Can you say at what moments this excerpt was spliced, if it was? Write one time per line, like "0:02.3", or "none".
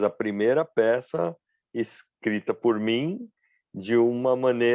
none